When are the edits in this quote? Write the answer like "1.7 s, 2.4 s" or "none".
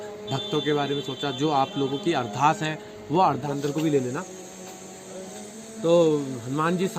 3.4 s